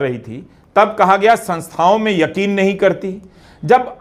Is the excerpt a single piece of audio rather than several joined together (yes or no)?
yes